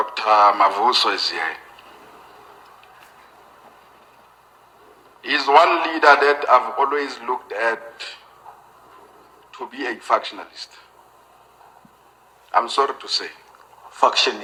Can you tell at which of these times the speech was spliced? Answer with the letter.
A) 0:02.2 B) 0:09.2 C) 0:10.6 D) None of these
D